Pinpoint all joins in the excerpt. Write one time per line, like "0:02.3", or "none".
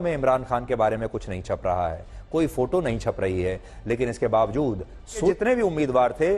0:05.3